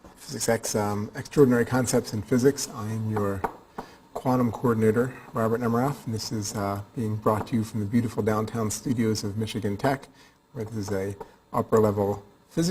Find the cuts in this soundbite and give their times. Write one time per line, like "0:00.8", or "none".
0:10.7